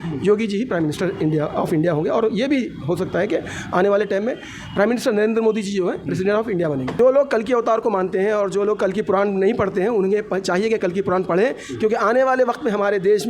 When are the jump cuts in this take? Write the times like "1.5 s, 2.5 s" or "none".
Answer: 6.9 s